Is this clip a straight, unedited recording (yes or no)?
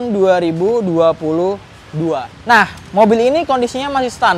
yes